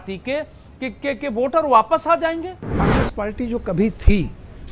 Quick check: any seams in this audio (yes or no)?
yes